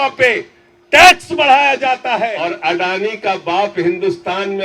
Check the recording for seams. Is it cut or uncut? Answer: cut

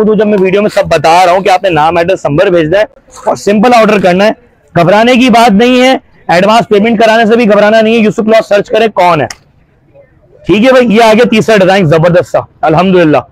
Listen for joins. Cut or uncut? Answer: uncut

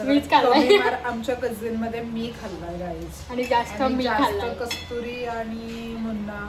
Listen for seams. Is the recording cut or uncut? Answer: uncut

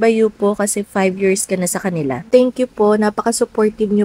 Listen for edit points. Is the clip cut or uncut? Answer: cut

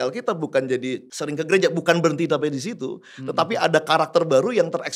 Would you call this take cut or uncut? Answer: cut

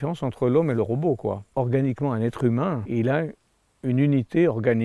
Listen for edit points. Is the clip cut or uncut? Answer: cut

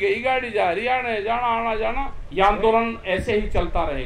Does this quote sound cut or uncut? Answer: cut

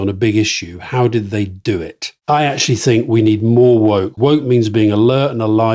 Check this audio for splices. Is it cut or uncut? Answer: cut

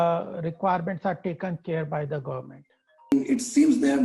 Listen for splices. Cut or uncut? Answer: cut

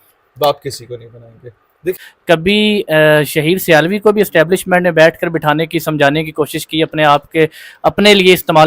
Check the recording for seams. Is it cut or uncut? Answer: cut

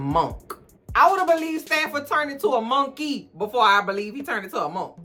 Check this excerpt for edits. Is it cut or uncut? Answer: uncut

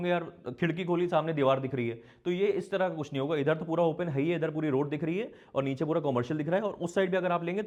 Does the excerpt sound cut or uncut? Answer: uncut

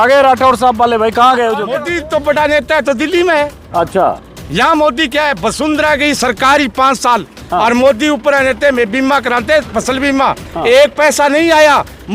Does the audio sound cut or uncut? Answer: cut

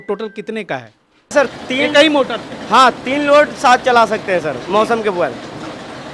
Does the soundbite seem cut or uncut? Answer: cut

